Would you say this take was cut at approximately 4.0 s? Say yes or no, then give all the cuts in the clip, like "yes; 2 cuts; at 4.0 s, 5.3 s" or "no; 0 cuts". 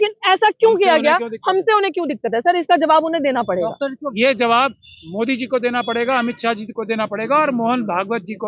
yes; 1 cut; at 4.0 s